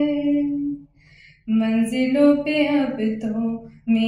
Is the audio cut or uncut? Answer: uncut